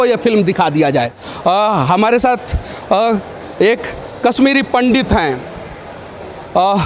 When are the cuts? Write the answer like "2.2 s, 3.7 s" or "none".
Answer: 1.2 s